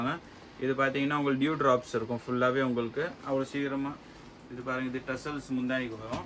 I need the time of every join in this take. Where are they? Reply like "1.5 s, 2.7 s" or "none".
none

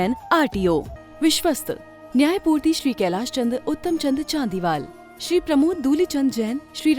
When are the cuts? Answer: 1.0 s

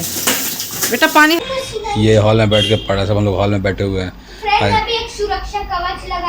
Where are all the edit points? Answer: 1.4 s

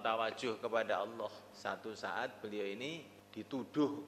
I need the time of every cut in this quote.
1.5 s, 3.2 s

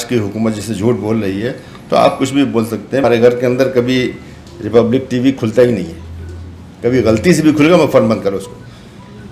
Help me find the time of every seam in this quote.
3.0 s

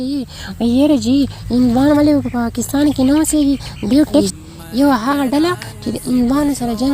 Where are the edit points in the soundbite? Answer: 4.3 s

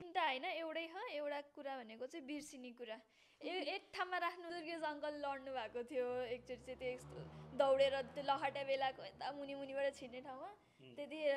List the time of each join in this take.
4.5 s

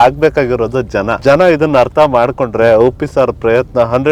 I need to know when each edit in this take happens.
1.1 s

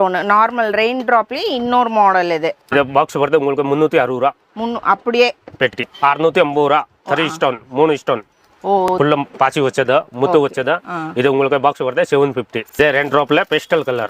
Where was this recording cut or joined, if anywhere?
2.7 s, 5.8 s, 8.9 s, 12.6 s

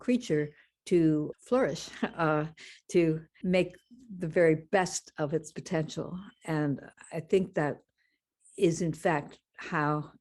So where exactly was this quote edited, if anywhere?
1.3 s, 3.3 s, 6.9 s

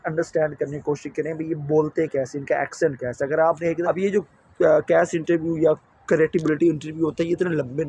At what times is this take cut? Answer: 3.8 s

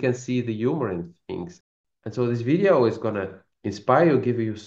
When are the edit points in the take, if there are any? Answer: 1.6 s

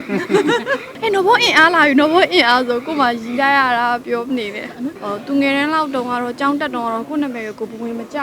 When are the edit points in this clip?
0.9 s, 5.0 s

